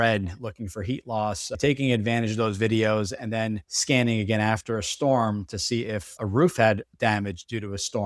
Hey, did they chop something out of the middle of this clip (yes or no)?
no